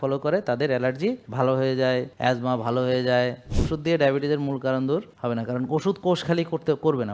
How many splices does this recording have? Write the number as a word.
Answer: four